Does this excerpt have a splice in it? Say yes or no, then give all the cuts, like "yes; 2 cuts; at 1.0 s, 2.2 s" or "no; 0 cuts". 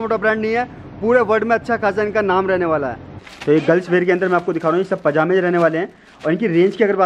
yes; 1 cut; at 3.0 s